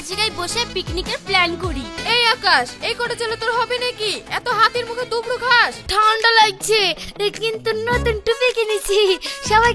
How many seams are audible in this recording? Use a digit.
2